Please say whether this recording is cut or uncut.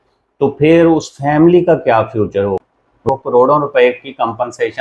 cut